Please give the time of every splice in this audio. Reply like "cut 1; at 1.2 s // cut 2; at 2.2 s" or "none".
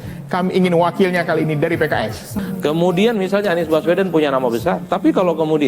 cut 1; at 2.2 s